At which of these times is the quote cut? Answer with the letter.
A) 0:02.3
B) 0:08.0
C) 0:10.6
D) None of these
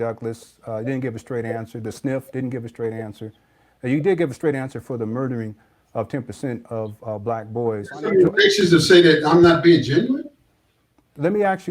B